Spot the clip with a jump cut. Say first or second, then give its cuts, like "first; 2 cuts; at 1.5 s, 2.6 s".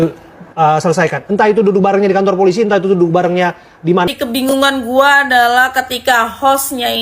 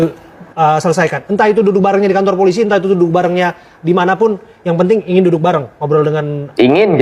first; 1 cut; at 4.1 s